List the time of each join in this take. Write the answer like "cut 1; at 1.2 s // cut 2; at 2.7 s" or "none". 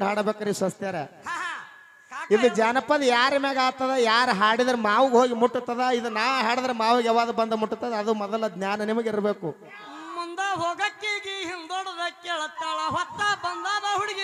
none